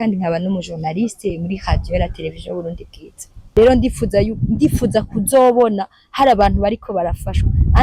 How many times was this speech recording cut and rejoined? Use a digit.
1